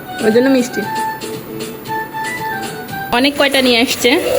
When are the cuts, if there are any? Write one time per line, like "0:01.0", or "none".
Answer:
0:03.1